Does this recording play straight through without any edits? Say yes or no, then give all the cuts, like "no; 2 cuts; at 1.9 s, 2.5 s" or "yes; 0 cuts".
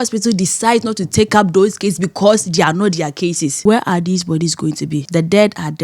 no; 2 cuts; at 3.5 s, 5.1 s